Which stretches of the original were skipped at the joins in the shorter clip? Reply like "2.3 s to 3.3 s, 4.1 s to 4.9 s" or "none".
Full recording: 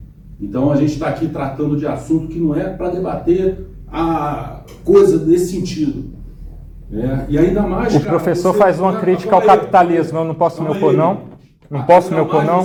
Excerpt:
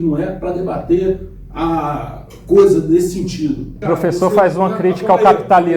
6.2 s to 8.1 s